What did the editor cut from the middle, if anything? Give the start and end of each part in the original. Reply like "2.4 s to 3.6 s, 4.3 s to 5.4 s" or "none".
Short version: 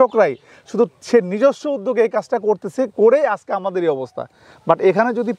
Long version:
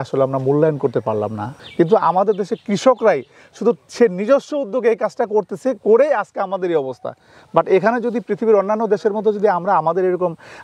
none